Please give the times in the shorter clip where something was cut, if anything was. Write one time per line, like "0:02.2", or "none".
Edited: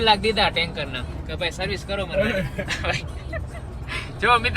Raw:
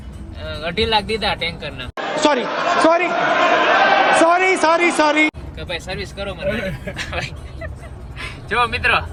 0:01.1